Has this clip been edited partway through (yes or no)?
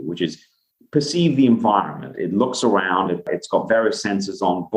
no